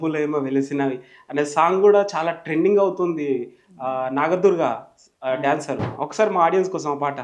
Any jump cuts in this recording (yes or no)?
yes